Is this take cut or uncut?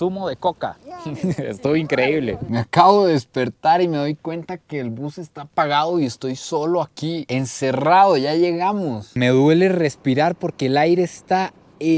cut